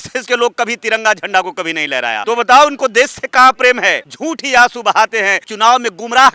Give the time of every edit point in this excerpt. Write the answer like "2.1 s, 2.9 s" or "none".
2.2 s, 4.1 s, 5.4 s